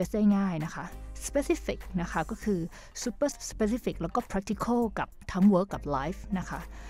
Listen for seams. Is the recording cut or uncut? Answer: uncut